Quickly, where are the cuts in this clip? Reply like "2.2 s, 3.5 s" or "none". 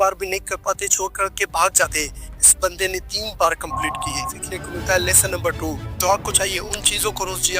4.3 s

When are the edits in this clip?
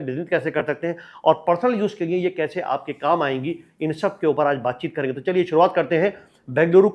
none

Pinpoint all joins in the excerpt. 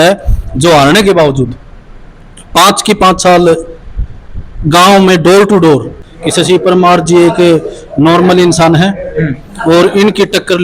6.0 s

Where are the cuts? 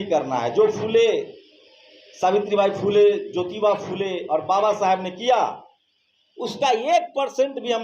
none

